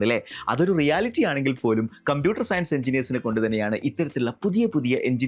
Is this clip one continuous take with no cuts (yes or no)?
yes